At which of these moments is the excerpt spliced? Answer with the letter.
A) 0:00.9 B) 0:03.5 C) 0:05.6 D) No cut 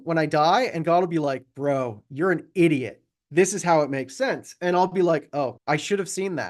C